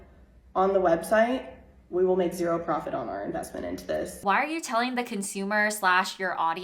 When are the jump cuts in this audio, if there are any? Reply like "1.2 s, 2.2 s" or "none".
4.1 s